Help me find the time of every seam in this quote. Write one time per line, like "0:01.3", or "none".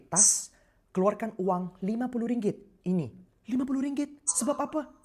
none